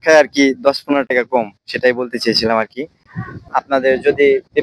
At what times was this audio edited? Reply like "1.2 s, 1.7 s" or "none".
3.4 s